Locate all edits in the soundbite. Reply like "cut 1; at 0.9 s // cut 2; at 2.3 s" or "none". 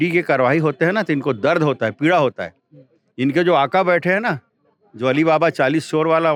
none